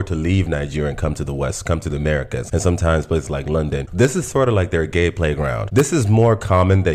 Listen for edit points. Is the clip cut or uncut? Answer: cut